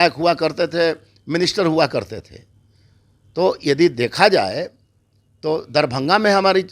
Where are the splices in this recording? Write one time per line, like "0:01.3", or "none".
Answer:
none

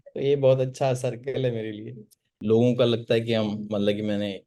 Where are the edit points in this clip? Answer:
0:02.4

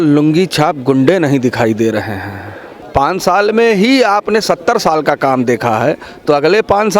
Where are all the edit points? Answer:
0:02.8

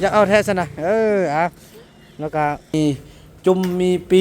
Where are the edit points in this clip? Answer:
0:02.7

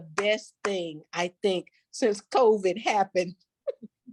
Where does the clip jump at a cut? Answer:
none

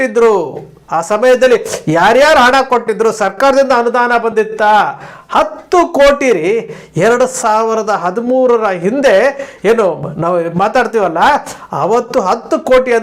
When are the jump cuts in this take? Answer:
none

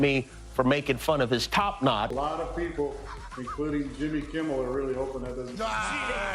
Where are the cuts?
0:02.1

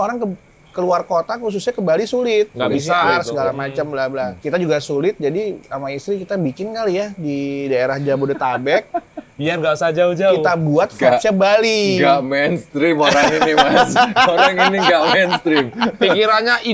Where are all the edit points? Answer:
0:04.4

